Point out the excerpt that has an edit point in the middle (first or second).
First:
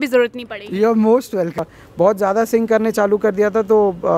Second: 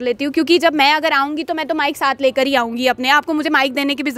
first